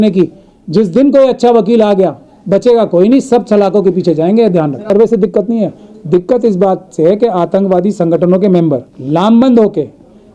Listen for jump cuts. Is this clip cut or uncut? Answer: cut